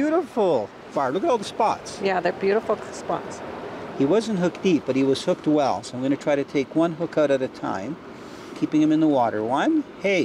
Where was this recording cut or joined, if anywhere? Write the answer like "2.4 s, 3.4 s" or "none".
none